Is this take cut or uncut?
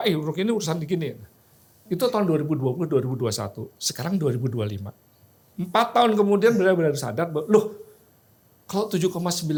uncut